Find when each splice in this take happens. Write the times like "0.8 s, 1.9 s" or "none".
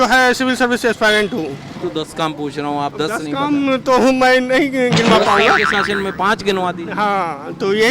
1.8 s